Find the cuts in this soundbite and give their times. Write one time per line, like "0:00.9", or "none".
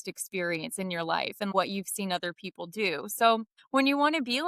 0:01.5
0:03.6